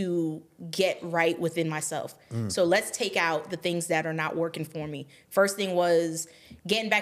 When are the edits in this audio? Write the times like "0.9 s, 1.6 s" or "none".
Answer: none